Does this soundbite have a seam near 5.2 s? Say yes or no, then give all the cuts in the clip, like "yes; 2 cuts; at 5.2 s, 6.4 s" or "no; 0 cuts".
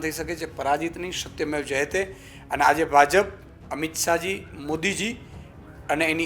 no; 0 cuts